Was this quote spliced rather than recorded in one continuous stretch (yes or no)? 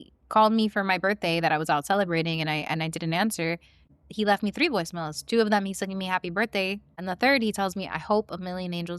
yes